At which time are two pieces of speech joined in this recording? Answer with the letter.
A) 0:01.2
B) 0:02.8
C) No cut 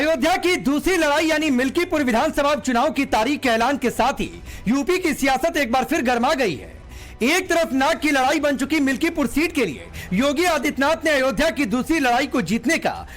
A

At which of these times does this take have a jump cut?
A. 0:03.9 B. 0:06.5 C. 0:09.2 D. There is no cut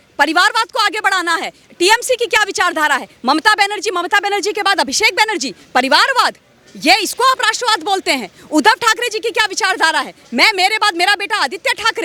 D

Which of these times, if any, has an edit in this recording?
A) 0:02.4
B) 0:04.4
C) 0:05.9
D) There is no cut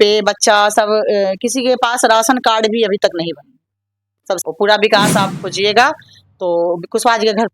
B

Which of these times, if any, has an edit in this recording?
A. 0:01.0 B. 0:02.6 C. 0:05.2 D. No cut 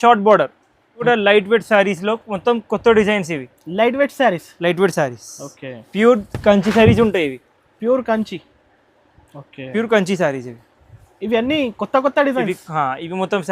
A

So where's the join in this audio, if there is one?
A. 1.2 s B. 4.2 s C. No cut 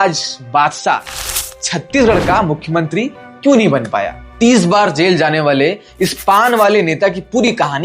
B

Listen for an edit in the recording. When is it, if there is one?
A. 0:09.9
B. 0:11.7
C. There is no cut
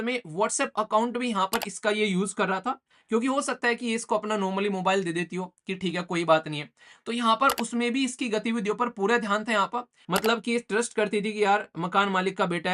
A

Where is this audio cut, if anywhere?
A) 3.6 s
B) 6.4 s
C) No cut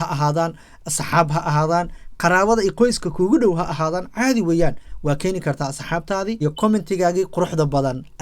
B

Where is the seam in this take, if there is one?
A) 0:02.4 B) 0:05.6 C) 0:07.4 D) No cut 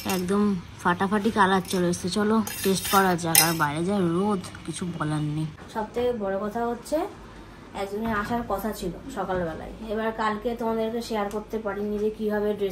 B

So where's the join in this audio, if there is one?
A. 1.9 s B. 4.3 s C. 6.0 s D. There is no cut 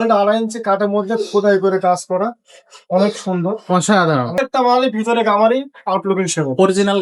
B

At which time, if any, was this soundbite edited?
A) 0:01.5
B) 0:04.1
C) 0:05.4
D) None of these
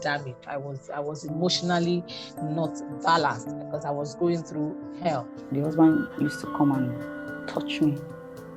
C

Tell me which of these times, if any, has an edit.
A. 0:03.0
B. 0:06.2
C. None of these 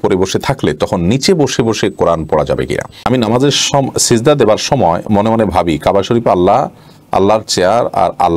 A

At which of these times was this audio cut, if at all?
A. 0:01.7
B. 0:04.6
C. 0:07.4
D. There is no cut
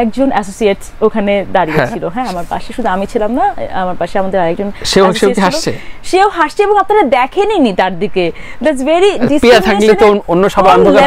D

